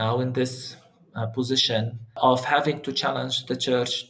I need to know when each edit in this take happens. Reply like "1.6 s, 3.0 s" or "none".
2.2 s